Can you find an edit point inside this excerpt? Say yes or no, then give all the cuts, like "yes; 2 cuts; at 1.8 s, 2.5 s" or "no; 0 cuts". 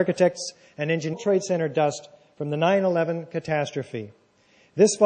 no; 0 cuts